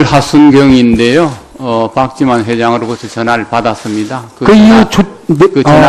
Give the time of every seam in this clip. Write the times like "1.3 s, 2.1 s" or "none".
4.5 s